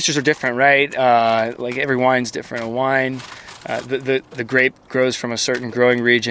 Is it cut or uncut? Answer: uncut